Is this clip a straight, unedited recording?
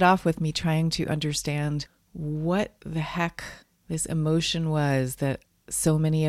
yes; 0 cuts

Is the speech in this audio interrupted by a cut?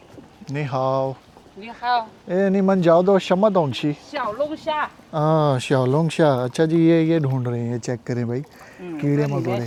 no; 0 cuts

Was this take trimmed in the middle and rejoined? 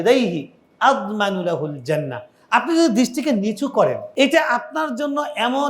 yes; 1 cut; at 4.1 s

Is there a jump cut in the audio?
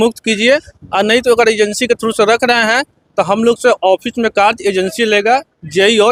no; 0 cuts

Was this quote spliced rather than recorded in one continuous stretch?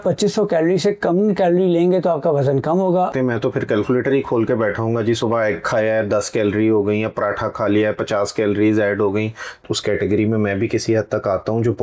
yes; 2 cuts; at 3.1 s, 9.6 s

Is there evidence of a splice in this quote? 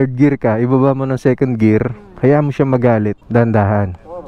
yes; 1 cut; at 3.2 s

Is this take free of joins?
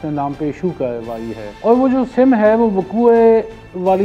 no; 1 cut; at 1.4 s

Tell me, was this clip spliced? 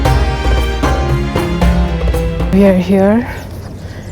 yes; 1 cut; at 2.5 s

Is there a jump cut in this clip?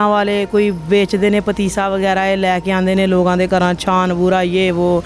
no; 0 cuts

